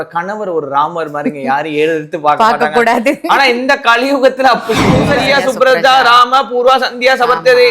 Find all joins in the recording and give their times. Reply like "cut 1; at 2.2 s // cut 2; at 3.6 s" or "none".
cut 1; at 5.0 s